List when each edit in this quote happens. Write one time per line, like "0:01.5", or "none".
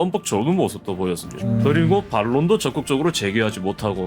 0:01.4